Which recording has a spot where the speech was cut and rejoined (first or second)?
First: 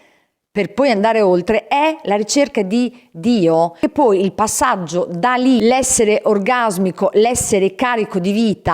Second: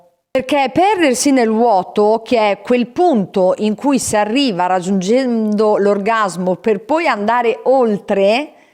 first